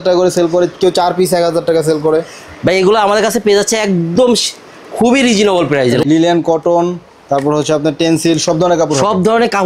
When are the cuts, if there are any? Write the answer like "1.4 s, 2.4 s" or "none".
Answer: 6.0 s